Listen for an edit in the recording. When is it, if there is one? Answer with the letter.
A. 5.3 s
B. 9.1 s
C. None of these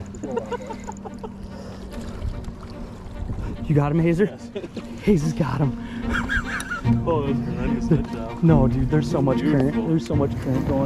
C